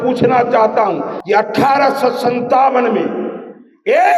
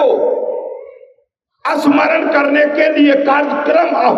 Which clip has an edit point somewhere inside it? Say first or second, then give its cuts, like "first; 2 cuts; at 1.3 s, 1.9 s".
first; 1 cut; at 1.1 s